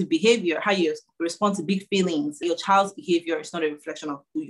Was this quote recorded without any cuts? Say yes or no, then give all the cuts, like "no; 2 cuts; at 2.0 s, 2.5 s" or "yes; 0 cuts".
no; 1 cut; at 2.4 s